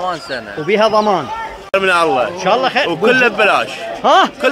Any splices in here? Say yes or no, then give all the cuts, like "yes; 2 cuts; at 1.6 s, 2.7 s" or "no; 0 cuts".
yes; 1 cut; at 1.6 s